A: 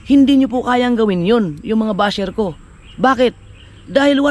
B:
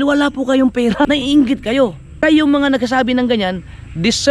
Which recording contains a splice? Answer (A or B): B